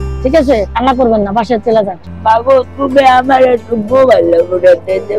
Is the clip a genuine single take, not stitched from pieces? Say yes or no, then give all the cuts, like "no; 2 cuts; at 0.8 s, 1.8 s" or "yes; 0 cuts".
yes; 0 cuts